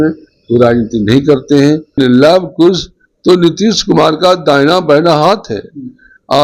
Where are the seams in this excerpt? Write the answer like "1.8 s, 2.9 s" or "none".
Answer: 2.0 s